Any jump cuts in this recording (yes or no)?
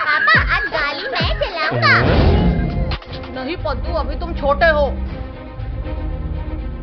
no